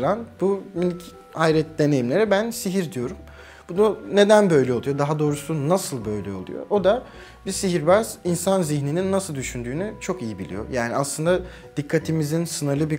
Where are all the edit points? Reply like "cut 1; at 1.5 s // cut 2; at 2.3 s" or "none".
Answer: none